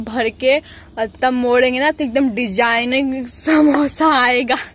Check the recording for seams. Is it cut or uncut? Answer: uncut